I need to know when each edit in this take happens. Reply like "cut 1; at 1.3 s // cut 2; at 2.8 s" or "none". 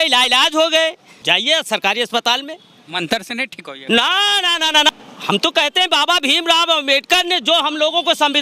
cut 1; at 1.1 s // cut 2; at 4.9 s